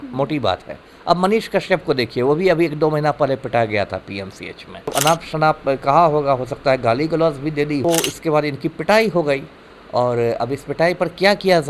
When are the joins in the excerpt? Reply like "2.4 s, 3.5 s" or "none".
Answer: 4.9 s, 7.8 s

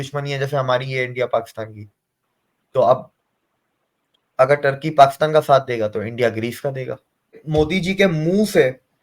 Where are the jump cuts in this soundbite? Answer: 7.4 s

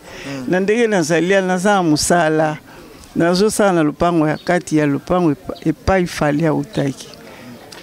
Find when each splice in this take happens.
none

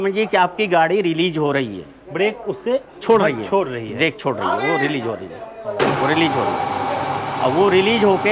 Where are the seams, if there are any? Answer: none

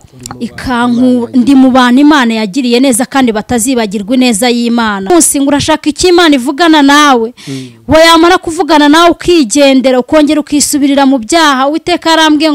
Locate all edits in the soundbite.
5.1 s

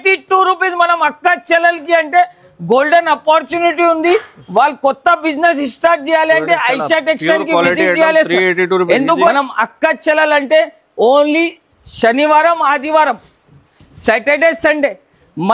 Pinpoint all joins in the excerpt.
9.2 s

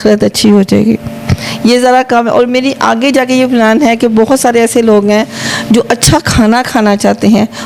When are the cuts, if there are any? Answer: none

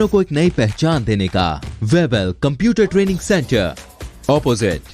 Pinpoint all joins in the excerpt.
1.7 s

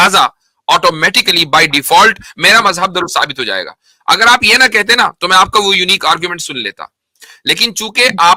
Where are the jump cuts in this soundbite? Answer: none

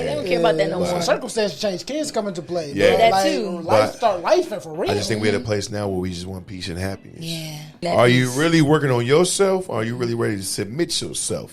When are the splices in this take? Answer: 7.8 s

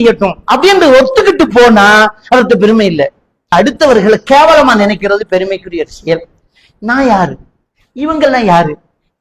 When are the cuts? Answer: 3.5 s

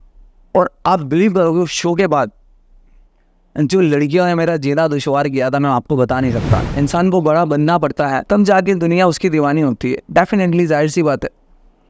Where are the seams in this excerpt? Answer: 6.6 s, 8.2 s

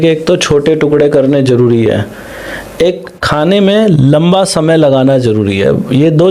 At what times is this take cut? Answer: none

